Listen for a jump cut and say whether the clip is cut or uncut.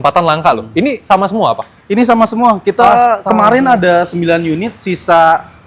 uncut